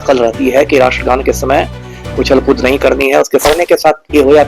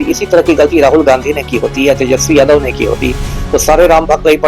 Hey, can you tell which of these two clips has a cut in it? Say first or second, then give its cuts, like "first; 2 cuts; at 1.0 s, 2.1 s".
first; 1 cut; at 3.4 s